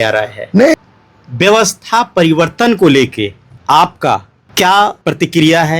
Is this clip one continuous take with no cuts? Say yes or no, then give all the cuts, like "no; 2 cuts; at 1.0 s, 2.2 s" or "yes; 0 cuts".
no; 4 cuts; at 0.7 s, 3.5 s, 4.4 s, 5.0 s